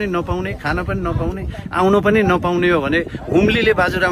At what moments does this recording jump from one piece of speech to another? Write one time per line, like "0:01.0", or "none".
none